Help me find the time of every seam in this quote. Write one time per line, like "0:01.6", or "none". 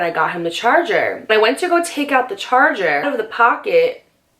0:01.3
0:03.0